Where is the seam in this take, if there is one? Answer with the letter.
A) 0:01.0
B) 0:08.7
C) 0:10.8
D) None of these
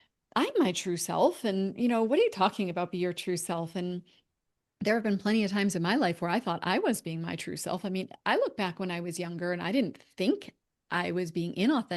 D